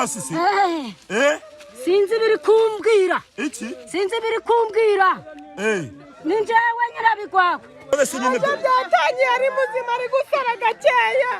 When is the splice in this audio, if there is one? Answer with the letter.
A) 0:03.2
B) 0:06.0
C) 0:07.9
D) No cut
C